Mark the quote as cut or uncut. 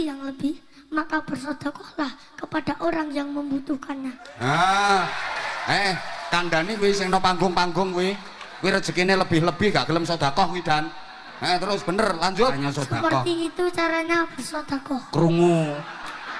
cut